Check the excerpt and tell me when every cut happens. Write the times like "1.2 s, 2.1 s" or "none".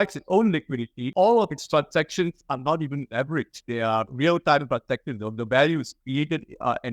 1.0 s